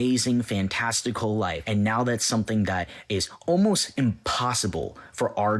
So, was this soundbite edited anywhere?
yes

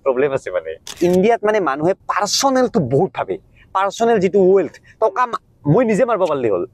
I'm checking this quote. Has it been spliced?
yes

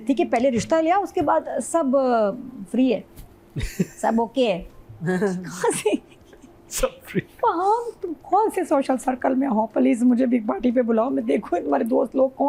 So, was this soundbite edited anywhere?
no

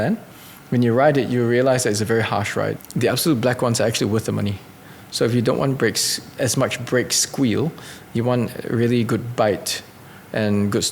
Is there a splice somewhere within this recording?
yes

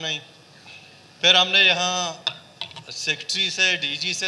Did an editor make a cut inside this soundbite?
no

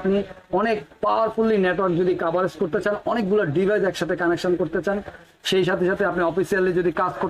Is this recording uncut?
yes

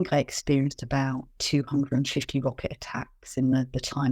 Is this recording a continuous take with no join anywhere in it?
no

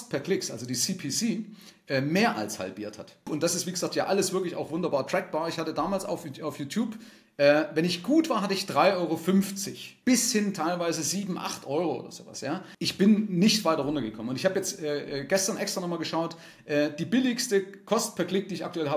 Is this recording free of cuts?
no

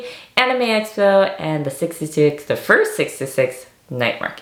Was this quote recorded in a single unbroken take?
yes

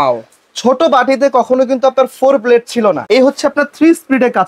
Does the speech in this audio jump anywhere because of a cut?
yes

